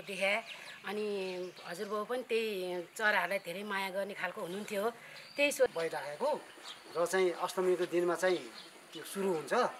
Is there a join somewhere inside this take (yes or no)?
yes